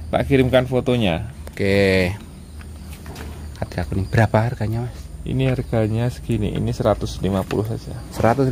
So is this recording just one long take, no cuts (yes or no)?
yes